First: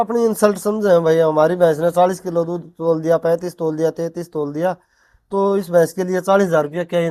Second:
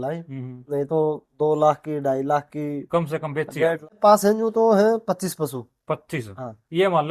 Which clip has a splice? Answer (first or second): second